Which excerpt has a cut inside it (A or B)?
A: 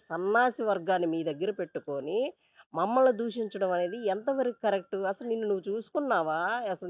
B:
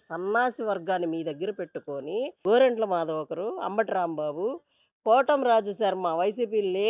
B